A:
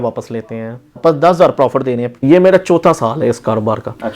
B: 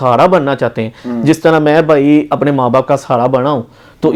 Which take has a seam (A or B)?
A